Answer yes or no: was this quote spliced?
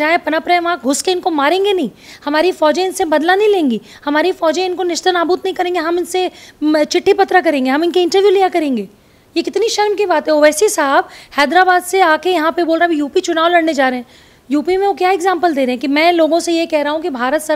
no